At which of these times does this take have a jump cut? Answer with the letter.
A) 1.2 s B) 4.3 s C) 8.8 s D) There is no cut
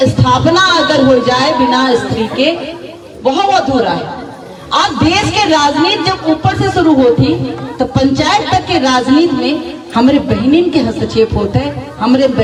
D